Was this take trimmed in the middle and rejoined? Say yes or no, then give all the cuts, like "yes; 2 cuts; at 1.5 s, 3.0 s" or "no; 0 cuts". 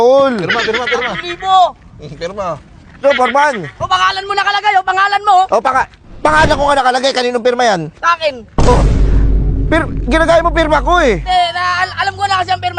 yes; 1 cut; at 3.0 s